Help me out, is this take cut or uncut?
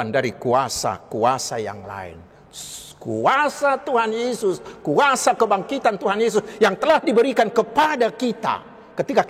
uncut